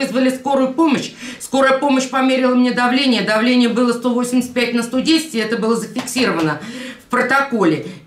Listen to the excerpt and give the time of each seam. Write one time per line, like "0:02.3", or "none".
none